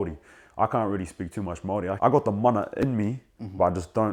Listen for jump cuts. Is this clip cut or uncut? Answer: cut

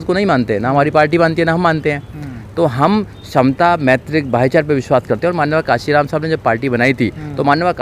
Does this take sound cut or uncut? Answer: uncut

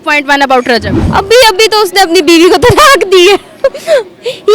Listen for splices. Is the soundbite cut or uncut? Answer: cut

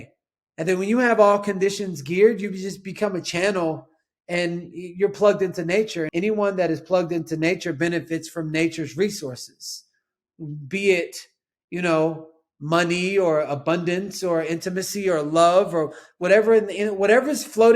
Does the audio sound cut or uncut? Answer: cut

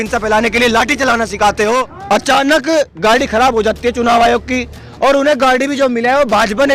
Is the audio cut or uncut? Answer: cut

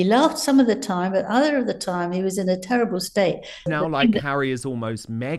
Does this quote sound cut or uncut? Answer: cut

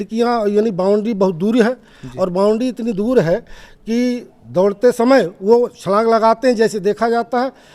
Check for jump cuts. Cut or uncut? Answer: uncut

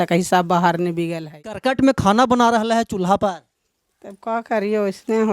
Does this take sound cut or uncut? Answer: cut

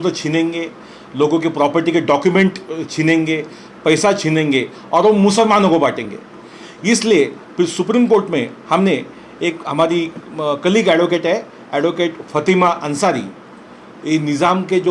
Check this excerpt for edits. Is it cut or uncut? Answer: uncut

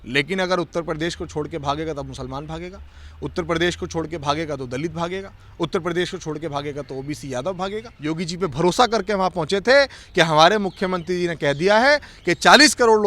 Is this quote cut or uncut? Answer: cut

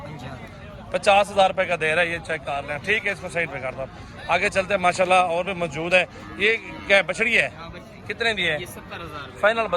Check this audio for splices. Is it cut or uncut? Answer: uncut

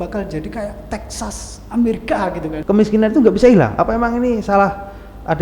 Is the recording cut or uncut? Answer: cut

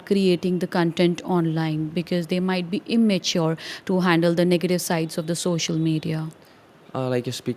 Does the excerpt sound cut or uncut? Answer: uncut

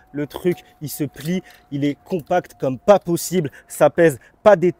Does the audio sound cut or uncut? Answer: uncut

